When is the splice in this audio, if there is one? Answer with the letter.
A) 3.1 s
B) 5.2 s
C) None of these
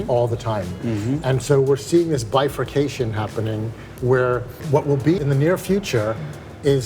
B